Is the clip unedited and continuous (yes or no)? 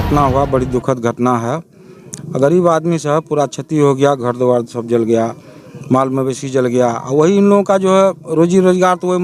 yes